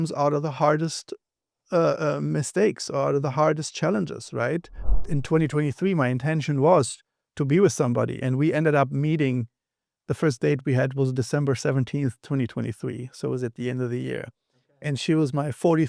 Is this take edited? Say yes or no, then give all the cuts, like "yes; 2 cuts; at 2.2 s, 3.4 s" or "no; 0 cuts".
yes; 1 cut; at 5.1 s